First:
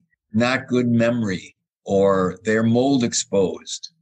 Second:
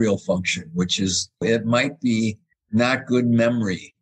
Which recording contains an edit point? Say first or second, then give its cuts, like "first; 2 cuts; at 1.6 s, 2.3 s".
second; 1 cut; at 1.4 s